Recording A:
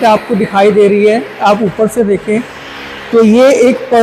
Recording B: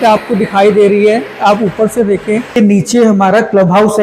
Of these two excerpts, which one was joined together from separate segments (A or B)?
B